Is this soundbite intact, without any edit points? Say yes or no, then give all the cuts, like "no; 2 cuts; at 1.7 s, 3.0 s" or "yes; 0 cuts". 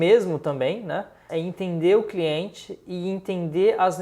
no; 1 cut; at 1.2 s